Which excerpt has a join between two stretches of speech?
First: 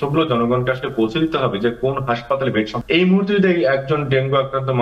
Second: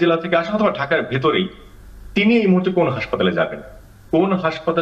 first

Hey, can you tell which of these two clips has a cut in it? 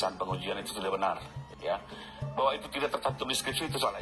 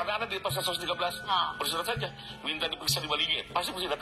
first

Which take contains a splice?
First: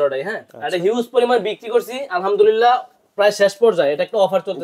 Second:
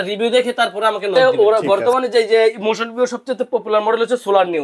second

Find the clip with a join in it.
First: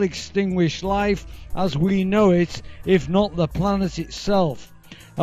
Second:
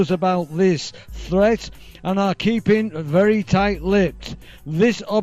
second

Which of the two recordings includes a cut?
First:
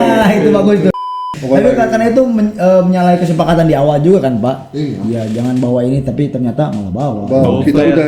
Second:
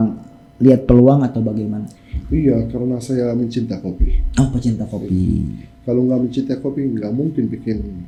first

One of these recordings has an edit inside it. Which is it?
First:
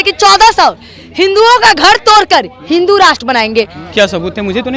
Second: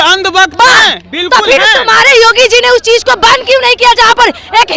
first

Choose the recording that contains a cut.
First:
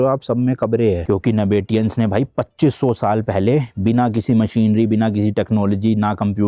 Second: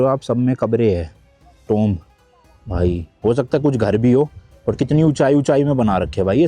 first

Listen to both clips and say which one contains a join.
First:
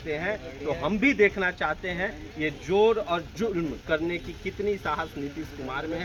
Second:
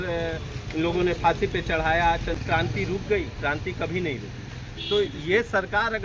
second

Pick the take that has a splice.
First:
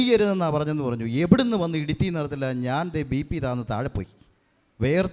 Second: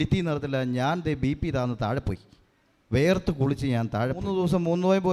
second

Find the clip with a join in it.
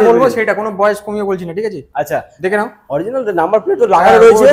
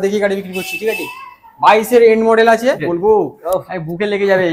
second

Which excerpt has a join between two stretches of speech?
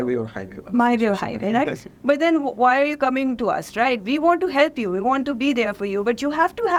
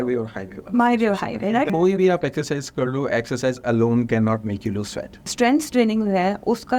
second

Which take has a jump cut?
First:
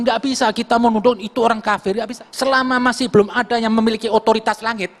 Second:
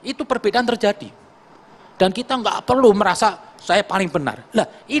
first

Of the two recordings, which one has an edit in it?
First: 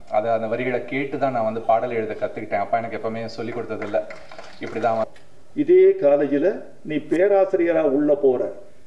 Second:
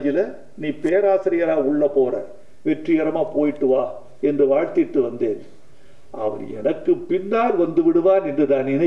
first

